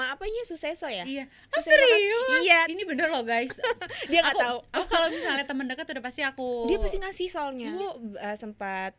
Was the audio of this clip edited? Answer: yes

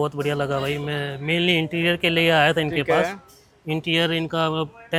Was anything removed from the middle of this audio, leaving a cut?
no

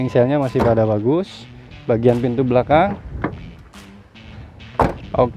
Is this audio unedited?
yes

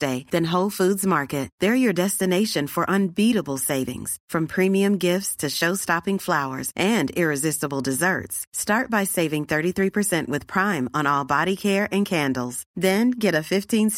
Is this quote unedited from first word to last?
yes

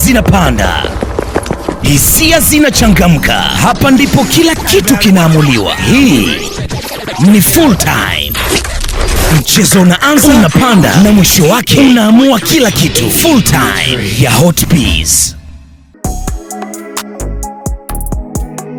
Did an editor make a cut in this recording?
no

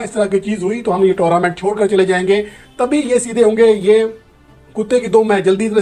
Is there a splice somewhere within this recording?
no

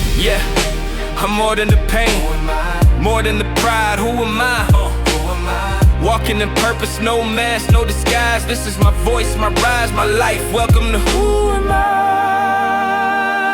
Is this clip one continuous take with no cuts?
yes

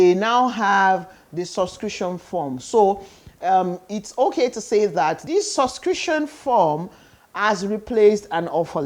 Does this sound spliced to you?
yes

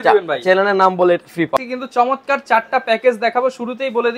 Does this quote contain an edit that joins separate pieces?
yes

